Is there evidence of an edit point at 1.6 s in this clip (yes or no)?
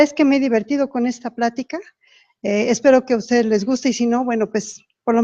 no